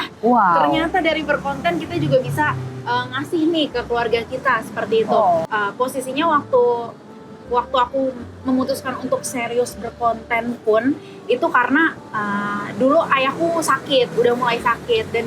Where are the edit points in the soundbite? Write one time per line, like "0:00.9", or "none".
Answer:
0:05.5